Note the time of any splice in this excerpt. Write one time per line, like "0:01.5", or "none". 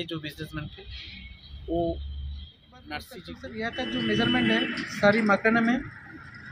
0:03.5